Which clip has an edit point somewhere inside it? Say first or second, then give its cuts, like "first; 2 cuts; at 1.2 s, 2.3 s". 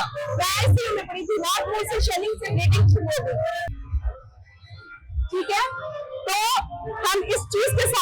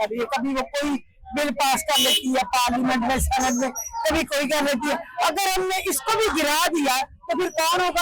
first; 1 cut; at 3.6 s